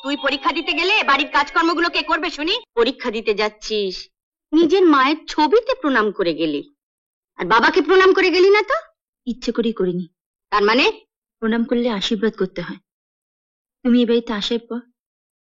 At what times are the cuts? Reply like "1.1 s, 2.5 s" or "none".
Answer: 2.6 s